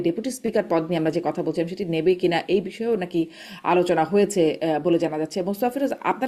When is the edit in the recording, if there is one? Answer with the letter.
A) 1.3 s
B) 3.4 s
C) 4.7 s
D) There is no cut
D